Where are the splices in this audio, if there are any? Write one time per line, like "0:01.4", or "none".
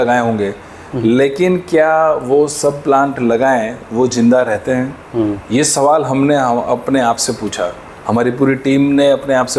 none